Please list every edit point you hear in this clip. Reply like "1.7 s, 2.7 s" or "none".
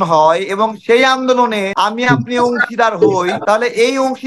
1.7 s, 3.4 s